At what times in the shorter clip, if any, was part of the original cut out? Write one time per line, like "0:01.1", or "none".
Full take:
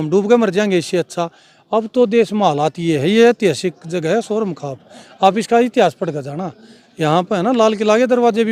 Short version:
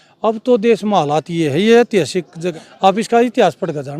0:02.4

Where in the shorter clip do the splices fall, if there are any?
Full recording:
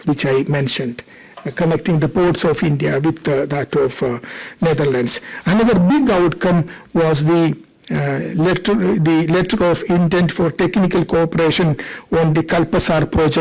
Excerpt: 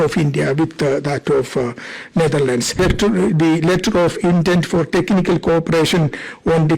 0:02.8

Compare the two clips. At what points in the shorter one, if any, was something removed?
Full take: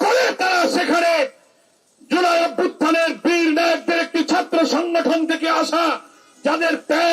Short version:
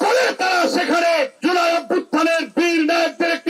0:01.3

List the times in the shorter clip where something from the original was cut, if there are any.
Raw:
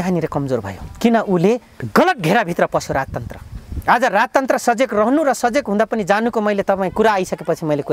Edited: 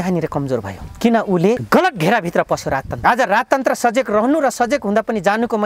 0:01.6
0:02.9

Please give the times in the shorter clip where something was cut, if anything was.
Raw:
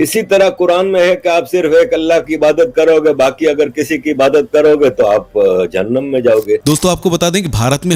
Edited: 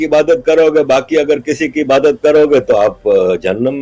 none

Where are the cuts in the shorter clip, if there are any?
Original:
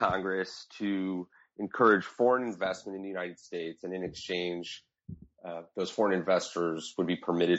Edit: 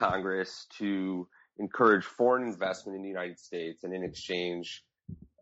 none

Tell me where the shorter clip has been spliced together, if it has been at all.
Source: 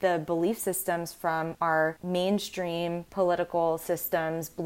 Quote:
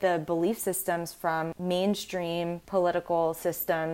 0:01.5

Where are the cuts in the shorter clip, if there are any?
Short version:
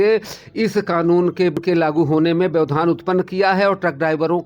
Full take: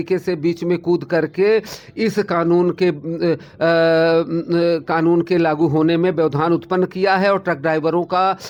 0:01.6

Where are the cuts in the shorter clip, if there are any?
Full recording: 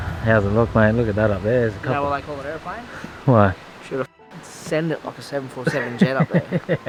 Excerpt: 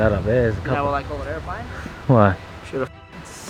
none

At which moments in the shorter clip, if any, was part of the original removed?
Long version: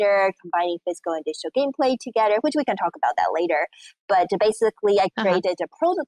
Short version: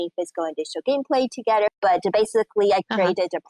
0:01.7

